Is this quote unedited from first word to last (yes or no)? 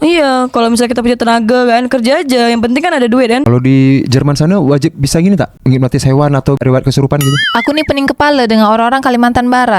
no